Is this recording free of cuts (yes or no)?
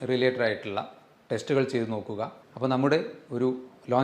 no